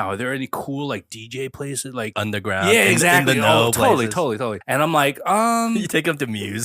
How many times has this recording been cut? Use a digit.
2